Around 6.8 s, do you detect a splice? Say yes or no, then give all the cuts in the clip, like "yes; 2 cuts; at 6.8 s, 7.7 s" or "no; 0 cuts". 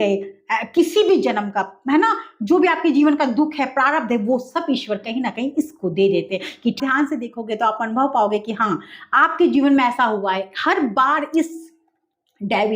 yes; 1 cut; at 6.8 s